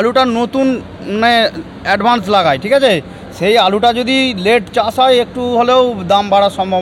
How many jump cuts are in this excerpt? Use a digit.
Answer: 0